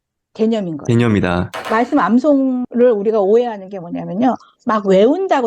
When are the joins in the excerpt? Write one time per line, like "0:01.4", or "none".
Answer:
0:01.7